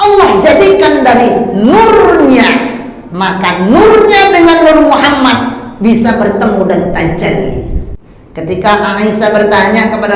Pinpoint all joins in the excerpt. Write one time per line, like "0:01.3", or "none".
0:07.8